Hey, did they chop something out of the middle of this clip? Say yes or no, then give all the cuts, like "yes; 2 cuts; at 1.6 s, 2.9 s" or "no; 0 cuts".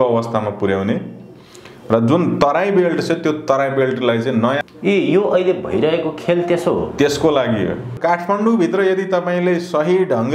yes; 2 cuts; at 4.7 s, 7.9 s